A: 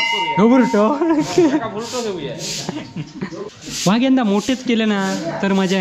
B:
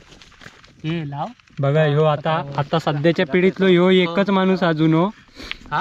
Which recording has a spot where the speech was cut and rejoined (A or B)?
A